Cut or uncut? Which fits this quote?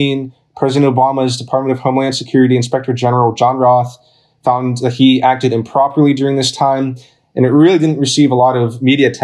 uncut